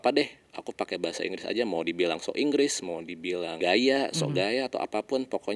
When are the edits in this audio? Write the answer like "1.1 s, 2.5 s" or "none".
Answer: 3.5 s